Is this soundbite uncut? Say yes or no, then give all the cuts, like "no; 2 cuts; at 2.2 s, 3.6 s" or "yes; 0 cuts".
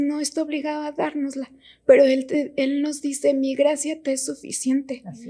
yes; 0 cuts